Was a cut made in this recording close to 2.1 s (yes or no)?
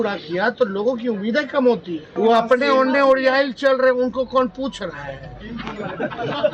yes